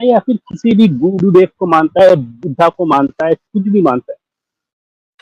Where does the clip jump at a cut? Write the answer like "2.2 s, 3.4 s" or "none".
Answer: none